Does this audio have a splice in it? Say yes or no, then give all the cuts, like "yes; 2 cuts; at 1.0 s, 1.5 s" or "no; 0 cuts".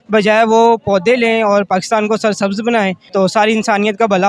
yes; 1 cut; at 3.0 s